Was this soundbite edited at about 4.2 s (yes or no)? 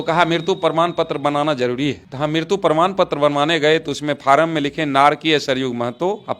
no